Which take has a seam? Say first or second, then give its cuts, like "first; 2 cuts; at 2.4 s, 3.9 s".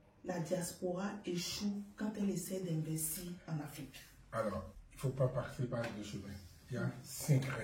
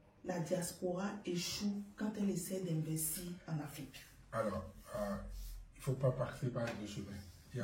first; 1 cut; at 4.8 s